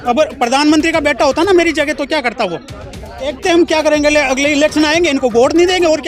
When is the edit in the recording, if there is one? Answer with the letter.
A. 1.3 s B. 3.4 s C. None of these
B